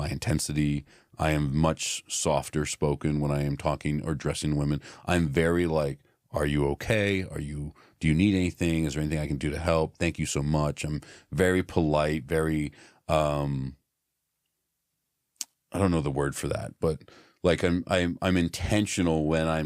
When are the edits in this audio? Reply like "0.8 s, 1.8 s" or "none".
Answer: none